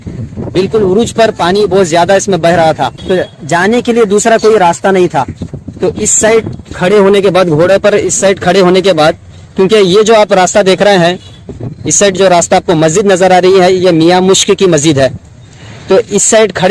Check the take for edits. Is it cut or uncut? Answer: uncut